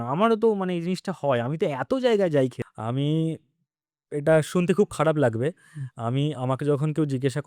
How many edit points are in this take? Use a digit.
1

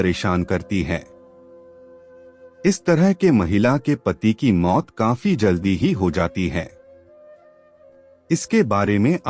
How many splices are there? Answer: 2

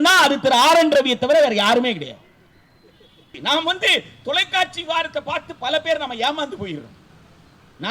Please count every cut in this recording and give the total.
1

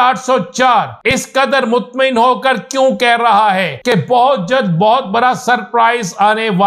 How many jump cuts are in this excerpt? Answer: 2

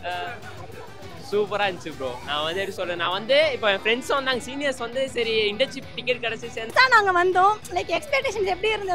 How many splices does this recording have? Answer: 1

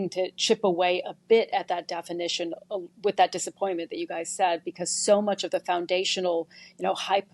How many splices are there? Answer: 0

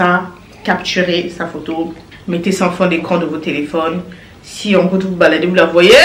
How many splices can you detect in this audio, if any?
0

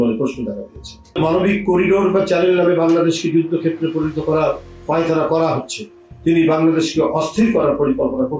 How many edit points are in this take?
0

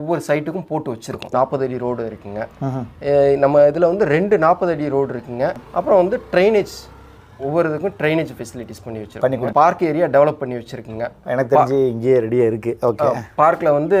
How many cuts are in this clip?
3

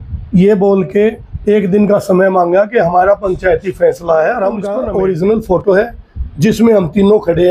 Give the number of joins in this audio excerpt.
1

